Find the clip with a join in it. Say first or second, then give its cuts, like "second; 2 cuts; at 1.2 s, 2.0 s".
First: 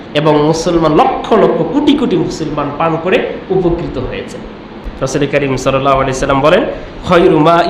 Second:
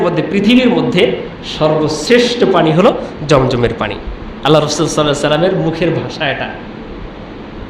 first; 1 cut; at 4.8 s